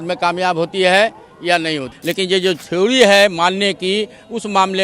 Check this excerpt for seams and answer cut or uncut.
cut